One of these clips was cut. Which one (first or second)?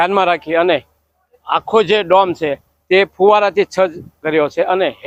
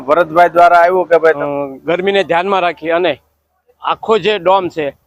second